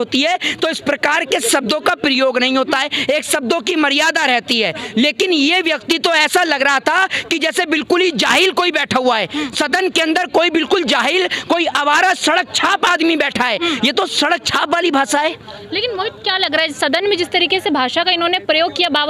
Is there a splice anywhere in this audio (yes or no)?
no